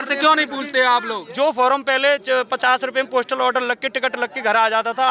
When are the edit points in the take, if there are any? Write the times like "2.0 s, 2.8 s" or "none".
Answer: 1.2 s